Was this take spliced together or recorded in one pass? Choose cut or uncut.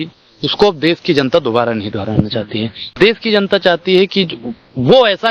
uncut